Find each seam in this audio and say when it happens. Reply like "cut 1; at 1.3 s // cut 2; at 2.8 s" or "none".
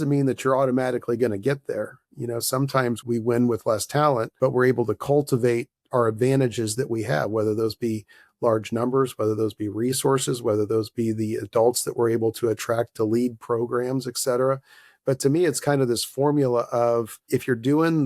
cut 1; at 3.0 s // cut 2; at 4.3 s // cut 3; at 17.2 s